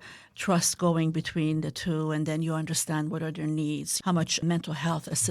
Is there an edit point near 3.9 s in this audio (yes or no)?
yes